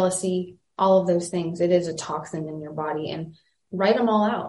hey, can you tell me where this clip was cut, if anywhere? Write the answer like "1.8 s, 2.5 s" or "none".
3.6 s